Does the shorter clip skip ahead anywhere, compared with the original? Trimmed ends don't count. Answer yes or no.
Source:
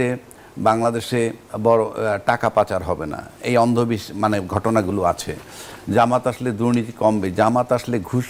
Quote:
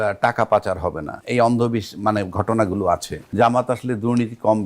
yes